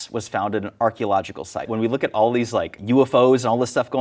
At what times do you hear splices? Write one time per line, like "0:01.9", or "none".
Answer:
0:01.7

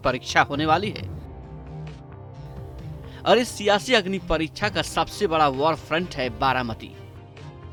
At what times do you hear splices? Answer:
none

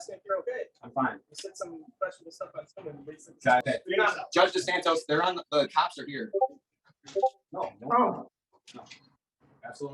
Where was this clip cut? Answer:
0:03.6

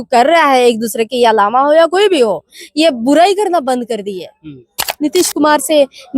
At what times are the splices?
0:04.8

